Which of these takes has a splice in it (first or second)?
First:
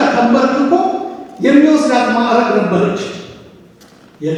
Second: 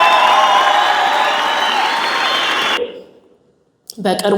second